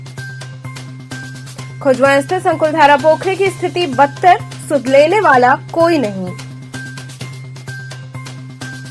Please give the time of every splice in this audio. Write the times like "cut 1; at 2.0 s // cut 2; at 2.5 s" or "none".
none

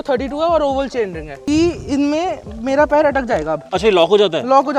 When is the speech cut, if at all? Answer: cut 1; at 1.4 s

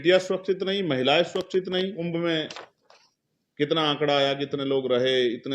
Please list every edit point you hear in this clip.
cut 1; at 2.0 s

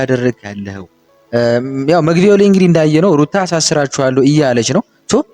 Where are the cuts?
none

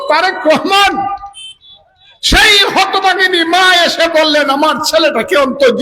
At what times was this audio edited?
none

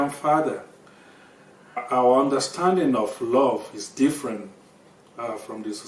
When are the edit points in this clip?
cut 1; at 1.8 s

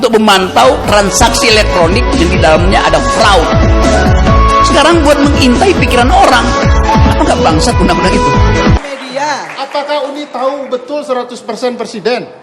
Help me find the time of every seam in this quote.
cut 1; at 8.8 s

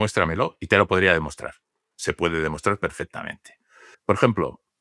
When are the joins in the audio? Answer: cut 1; at 3.9 s

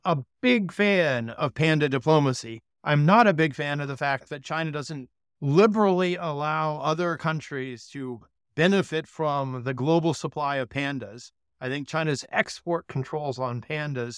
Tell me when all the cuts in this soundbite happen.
none

